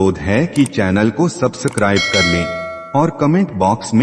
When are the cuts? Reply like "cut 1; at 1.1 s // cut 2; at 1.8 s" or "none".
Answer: none